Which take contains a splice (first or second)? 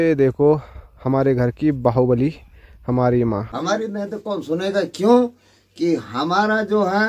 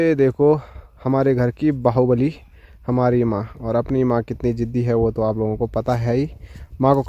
first